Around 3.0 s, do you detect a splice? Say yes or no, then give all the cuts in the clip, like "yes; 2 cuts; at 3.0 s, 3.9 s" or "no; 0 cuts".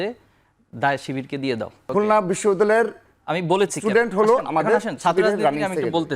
no; 1 cut; at 1.8 s